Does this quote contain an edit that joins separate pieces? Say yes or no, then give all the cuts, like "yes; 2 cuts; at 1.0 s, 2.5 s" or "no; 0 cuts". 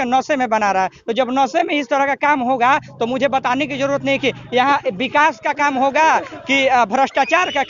no; 0 cuts